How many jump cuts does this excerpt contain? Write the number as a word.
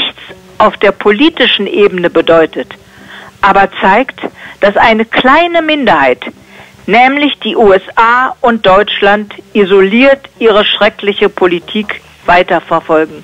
zero